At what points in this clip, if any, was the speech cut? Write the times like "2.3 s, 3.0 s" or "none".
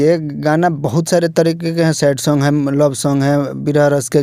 none